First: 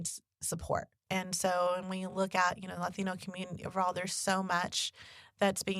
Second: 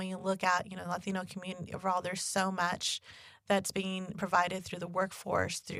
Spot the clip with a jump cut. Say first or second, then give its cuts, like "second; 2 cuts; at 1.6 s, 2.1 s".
first; 1 cut; at 0.9 s